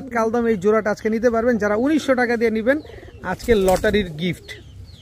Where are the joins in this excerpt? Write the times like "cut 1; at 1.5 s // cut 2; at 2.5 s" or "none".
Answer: none